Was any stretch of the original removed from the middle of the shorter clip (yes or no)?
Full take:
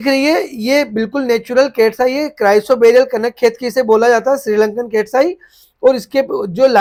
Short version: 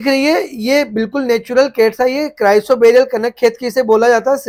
no